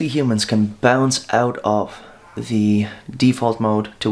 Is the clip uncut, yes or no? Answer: yes